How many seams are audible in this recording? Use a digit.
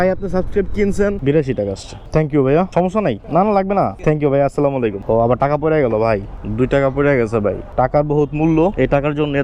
3